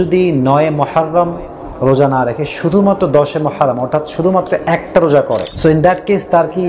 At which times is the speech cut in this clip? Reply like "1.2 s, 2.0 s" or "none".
5.5 s